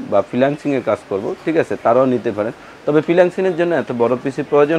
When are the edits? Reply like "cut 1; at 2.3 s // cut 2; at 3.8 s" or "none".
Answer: none